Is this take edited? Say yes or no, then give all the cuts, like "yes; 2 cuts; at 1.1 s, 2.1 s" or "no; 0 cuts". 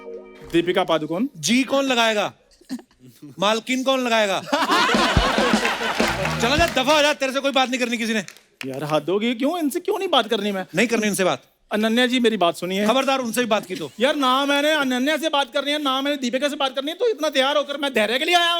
yes; 1 cut; at 6.3 s